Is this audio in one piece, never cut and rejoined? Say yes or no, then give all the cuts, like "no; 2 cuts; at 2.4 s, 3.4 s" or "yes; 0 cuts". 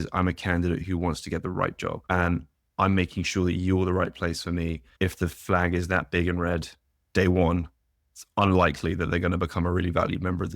no; 2 cuts; at 2.0 s, 4.8 s